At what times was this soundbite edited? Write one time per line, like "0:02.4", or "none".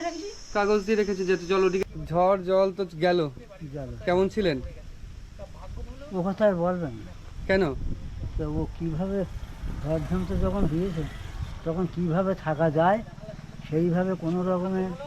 0:01.8